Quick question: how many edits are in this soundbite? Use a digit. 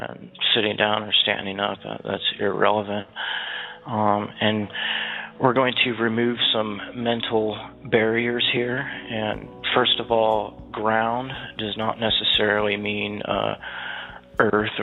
0